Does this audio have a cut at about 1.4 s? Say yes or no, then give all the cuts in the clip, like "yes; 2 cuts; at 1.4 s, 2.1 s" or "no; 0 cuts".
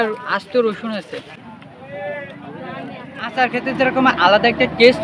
yes; 2 cuts; at 1.4 s, 3.2 s